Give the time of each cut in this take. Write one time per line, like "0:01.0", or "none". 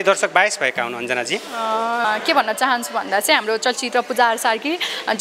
0:02.0